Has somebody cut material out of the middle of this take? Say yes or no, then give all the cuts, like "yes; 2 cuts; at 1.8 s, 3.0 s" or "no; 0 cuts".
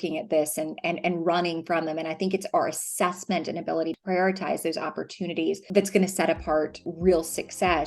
yes; 3 cuts; at 4.0 s, 5.6 s, 6.9 s